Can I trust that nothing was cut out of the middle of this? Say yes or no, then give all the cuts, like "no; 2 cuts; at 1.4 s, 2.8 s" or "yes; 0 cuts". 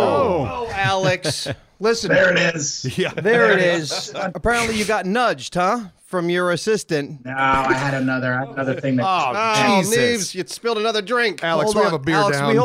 no; 2 cuts; at 4.3 s, 7.2 s